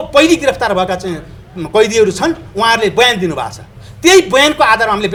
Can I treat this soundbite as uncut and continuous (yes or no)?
yes